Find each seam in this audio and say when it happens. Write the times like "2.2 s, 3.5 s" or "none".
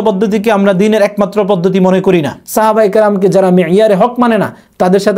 2.4 s